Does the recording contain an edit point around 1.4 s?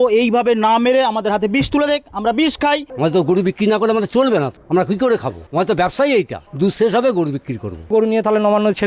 no; 5 cuts; at 2.9 s, 4.6 s, 5.4 s, 6.4 s, 7.9 s

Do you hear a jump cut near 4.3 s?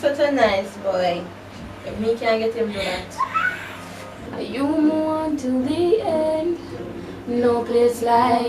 yes; 1 cut; at 4.3 s

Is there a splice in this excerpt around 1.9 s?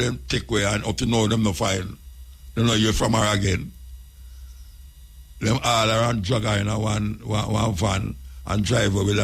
no; 0 cuts

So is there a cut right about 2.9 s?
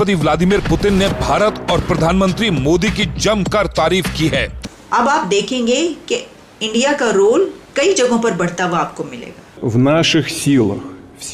no; 2 cuts; at 4.6 s, 9.5 s

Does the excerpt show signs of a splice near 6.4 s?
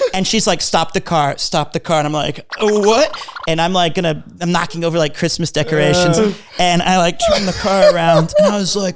no; 0 cuts

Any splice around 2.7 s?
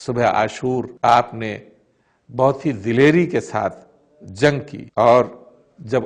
no; 2 cuts; at 0.9 s, 4.8 s

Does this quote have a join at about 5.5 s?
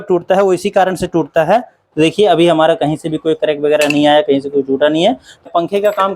yes; 2 cuts; at 1.8 s, 5.5 s

